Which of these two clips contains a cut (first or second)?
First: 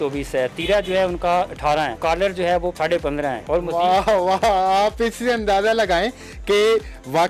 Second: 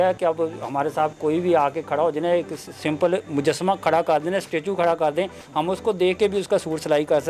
first